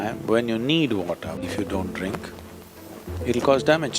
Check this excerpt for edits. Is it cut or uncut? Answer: cut